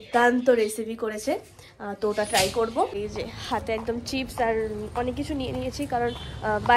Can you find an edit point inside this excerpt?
yes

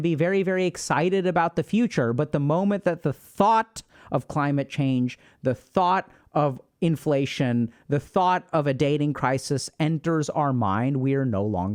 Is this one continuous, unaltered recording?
yes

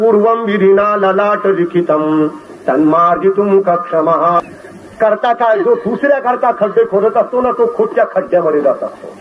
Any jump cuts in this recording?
yes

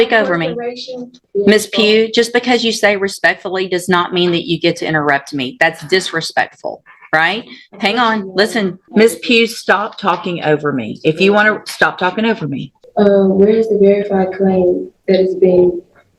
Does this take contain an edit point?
yes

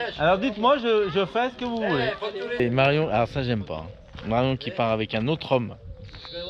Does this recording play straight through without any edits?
no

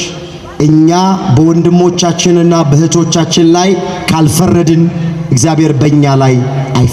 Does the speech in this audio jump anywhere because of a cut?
no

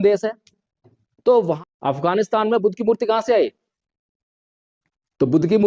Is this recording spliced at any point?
yes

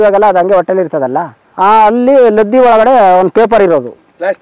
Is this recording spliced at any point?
yes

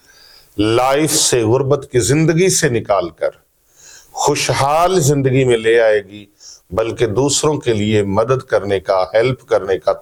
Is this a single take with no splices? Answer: yes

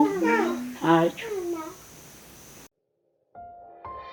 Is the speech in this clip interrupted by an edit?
yes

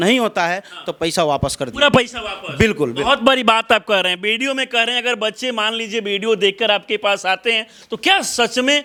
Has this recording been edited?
no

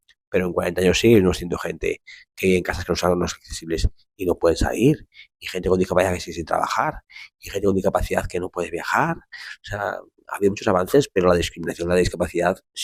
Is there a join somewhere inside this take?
no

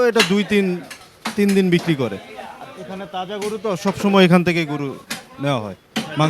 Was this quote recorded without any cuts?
yes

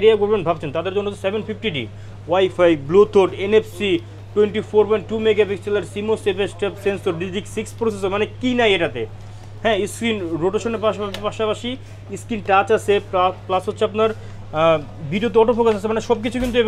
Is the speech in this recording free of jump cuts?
yes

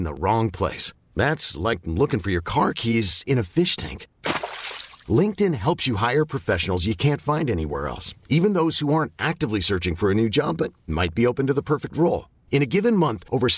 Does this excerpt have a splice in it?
no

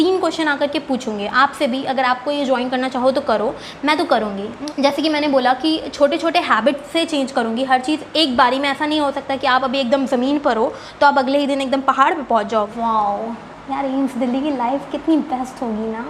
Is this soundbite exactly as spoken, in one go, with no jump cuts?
no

